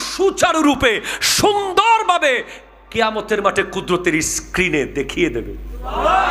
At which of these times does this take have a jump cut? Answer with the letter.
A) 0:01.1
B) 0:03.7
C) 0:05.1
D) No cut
D